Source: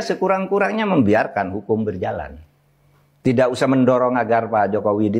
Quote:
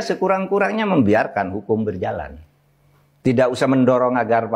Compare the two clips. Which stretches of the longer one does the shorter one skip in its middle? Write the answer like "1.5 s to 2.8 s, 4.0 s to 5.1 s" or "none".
none